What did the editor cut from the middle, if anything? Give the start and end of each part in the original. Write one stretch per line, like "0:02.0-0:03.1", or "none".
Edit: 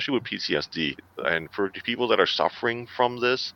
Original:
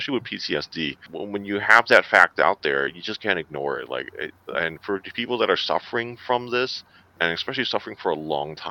0:01.0-0:04.3